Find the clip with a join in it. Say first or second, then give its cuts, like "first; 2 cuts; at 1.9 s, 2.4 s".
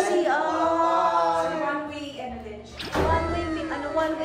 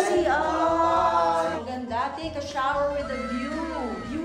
second; 1 cut; at 1.6 s